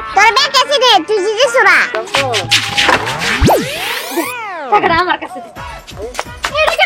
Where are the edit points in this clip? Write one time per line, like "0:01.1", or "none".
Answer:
0:01.9